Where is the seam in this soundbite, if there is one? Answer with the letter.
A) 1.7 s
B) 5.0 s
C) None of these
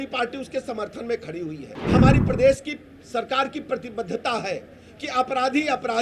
A